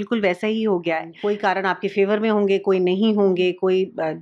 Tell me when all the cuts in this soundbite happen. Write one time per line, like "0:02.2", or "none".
0:01.1